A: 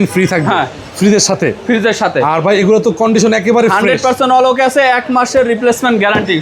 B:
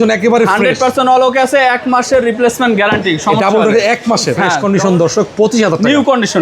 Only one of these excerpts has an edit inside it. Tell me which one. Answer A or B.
B